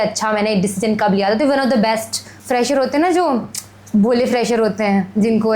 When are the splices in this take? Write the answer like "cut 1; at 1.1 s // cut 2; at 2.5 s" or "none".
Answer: cut 1; at 2.3 s